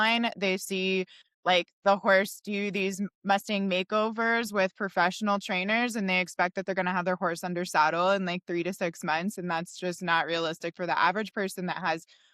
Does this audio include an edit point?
no; 0 cuts

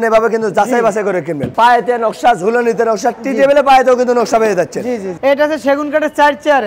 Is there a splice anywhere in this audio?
yes; 2 cuts; at 1.5 s, 5.1 s

